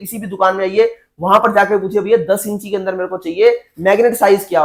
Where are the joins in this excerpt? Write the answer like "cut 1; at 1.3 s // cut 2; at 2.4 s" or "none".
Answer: none